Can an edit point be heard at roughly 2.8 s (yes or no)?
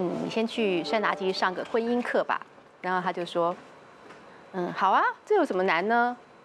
no